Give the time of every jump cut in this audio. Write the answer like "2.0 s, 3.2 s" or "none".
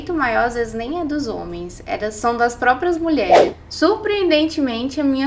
3.5 s